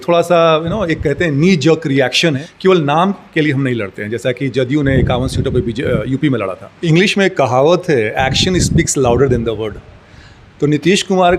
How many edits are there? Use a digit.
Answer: 2